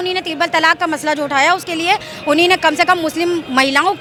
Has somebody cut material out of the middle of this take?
no; 0 cuts

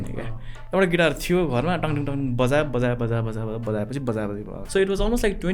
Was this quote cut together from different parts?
yes; 1 cut; at 4.6 s

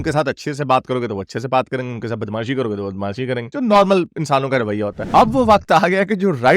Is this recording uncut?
no; 1 cut; at 5.0 s

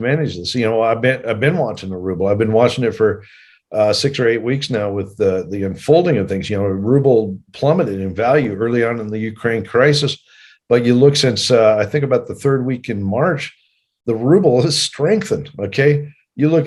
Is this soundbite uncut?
yes; 0 cuts

